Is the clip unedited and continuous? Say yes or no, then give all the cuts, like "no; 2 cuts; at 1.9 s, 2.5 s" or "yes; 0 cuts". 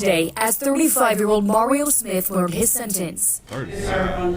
no; 1 cut; at 3.2 s